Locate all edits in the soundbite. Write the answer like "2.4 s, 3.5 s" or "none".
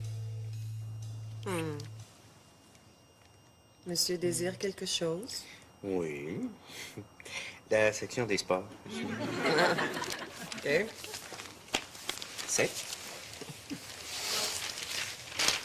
none